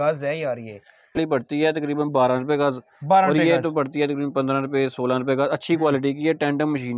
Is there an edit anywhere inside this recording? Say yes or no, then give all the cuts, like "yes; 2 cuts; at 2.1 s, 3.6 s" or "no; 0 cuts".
yes; 1 cut; at 1.2 s